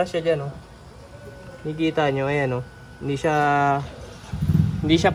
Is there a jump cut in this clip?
no; 0 cuts

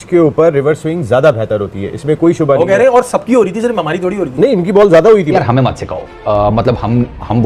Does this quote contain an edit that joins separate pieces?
yes; 1 cut; at 5.5 s

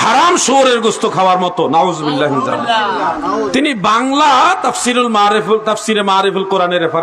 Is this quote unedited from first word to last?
yes; 0 cuts

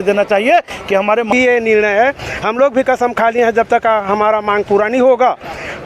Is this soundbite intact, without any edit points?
no; 1 cut; at 1.3 s

